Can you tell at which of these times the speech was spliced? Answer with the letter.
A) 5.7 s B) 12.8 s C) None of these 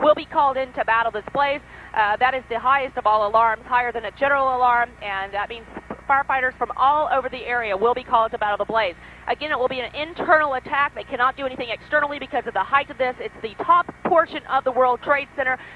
A